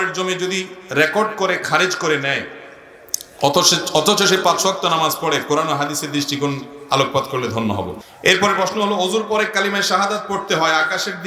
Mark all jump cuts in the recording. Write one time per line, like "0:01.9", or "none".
0:08.0